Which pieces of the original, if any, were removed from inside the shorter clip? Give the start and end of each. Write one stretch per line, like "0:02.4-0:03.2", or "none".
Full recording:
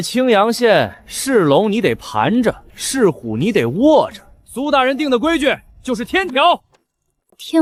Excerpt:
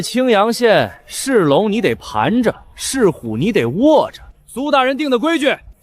none